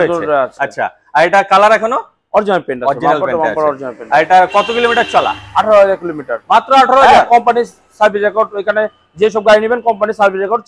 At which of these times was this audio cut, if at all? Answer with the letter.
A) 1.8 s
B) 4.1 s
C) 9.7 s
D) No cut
D